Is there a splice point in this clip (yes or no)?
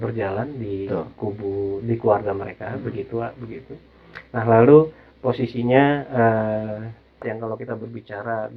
yes